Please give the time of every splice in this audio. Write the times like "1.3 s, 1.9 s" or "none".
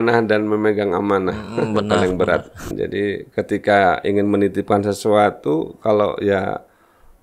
2.8 s